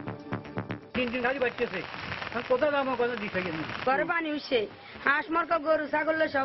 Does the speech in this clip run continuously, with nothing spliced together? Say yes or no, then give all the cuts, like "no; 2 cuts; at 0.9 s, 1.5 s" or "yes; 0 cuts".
no; 2 cuts; at 0.9 s, 3.8 s